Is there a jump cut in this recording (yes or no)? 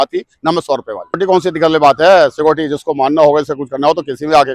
yes